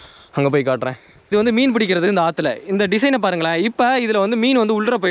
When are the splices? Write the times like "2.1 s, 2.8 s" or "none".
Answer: 1.2 s

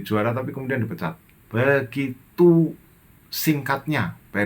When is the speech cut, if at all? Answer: 1.3 s

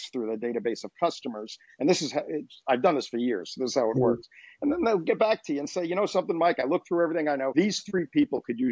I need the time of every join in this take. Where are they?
7.5 s

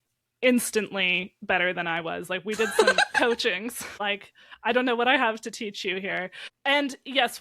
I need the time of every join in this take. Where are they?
4.0 s, 6.4 s

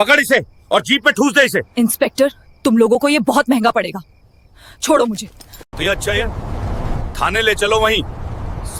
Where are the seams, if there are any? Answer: none

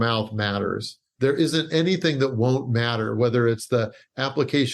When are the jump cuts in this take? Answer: 1.0 s

